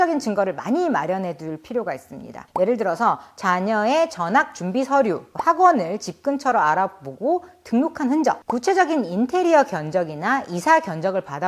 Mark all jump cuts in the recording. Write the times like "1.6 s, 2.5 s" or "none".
none